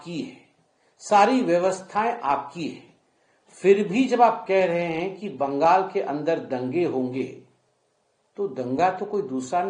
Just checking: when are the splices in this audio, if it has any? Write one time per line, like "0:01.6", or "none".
none